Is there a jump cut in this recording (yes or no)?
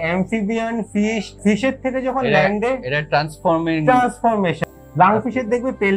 yes